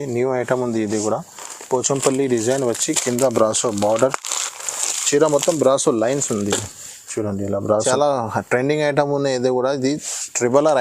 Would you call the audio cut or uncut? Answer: cut